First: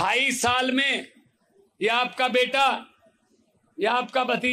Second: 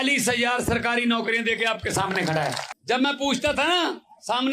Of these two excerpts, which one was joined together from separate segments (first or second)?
second